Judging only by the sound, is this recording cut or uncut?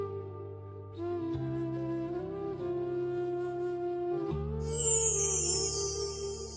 uncut